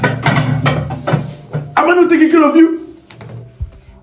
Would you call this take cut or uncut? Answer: uncut